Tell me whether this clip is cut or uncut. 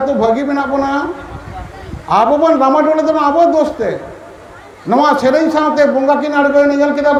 uncut